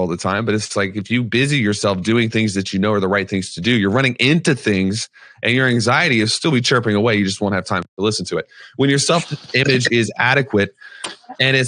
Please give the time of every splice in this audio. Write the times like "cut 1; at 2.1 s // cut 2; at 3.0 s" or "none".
none